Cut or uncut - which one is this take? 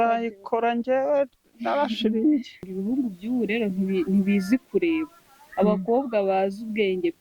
cut